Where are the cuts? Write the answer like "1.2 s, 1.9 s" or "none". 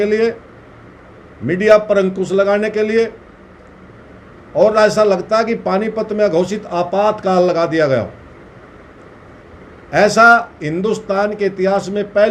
none